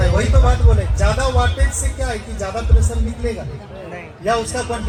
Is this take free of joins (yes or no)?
yes